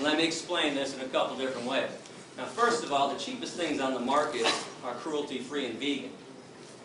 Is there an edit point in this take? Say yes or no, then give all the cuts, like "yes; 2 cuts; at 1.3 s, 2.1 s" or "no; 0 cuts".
yes; 1 cut; at 4.6 s